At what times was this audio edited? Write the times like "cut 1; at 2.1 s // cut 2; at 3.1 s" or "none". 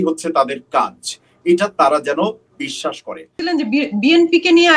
cut 1; at 3.4 s